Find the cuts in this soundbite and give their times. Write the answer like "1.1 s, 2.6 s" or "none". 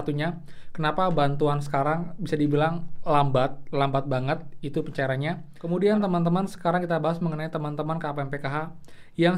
5.5 s